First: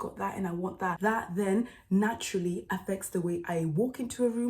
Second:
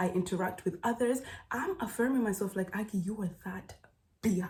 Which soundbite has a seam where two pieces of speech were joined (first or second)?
first